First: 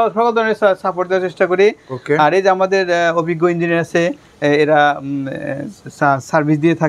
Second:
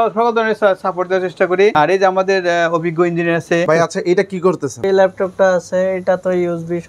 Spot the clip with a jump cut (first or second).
second